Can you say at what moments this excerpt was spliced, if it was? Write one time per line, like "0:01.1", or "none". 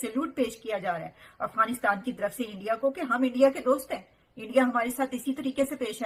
none